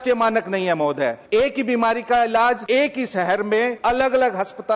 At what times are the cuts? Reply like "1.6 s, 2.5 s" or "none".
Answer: 1.2 s, 2.6 s, 3.8 s